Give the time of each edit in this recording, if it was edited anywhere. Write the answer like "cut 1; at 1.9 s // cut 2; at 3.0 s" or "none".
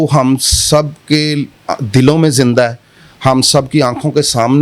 none